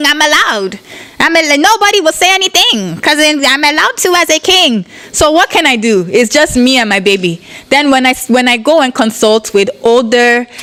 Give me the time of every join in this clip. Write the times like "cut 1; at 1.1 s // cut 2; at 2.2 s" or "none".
none

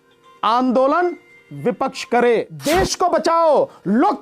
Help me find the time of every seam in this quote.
cut 1; at 2.5 s

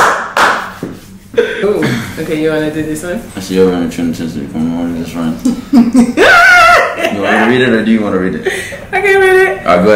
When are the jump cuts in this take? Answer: cut 1; at 1.6 s

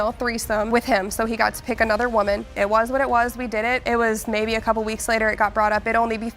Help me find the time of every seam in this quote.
none

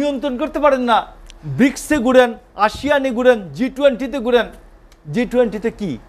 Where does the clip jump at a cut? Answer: none

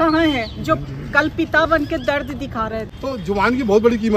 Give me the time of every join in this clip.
cut 1; at 2.9 s

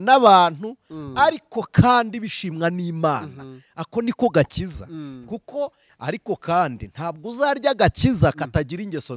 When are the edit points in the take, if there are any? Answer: cut 1; at 5.9 s

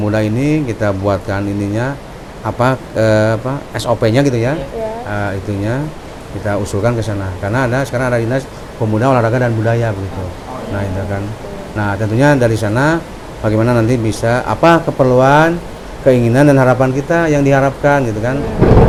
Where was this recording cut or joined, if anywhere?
none

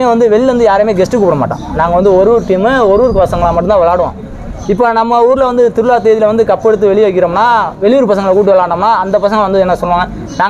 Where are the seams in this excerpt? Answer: none

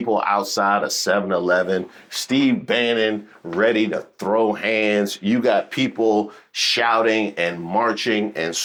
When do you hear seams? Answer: none

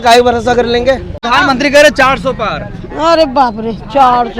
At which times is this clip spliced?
cut 1; at 1.2 s

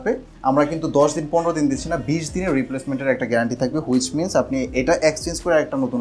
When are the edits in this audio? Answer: none

